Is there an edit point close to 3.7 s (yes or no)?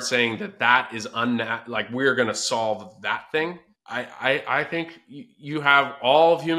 no